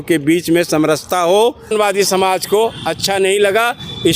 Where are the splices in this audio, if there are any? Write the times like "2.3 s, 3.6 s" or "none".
1.7 s